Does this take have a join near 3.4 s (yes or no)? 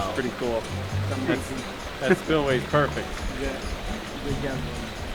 no